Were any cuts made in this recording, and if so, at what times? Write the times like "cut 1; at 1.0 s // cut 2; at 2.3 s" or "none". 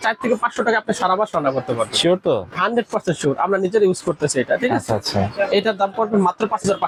none

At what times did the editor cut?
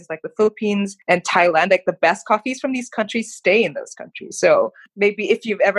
cut 1; at 1.0 s

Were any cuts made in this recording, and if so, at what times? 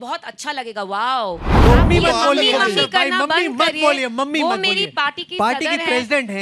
cut 1; at 1.5 s

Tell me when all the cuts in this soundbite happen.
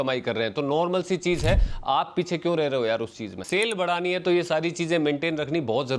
cut 1; at 3.4 s

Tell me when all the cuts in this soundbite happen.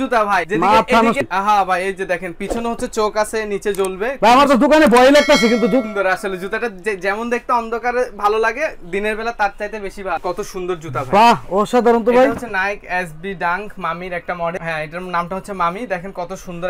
none

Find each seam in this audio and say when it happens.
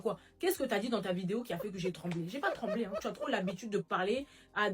none

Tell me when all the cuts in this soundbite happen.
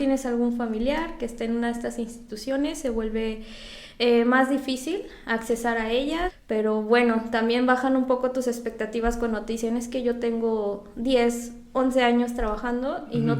cut 1; at 6.4 s

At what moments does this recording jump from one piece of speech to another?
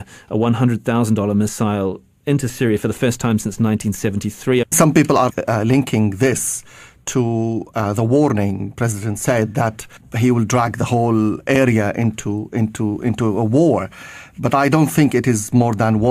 cut 1; at 12.7 s

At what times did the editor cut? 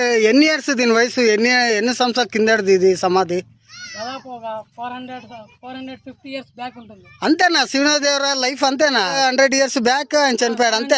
cut 1; at 9.1 s

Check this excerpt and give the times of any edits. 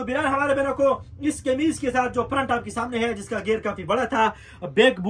none

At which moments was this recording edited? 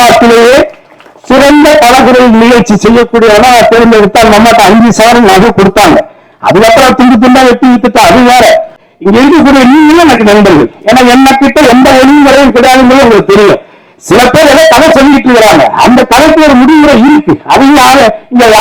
cut 1; at 8.8 s

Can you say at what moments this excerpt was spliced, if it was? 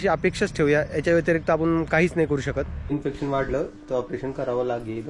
cut 1; at 2.9 s

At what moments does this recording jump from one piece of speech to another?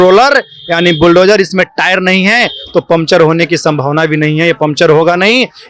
none

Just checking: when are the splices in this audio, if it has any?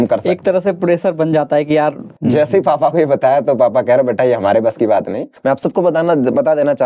cut 1; at 2.1 s // cut 2; at 5.2 s

